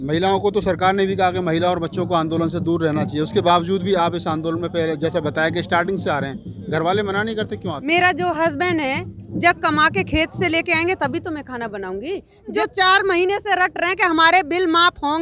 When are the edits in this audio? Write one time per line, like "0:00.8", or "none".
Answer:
0:07.7
0:12.5